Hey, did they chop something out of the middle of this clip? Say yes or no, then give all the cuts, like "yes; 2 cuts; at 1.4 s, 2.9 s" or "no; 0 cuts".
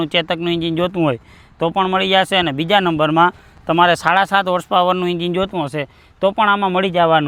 no; 0 cuts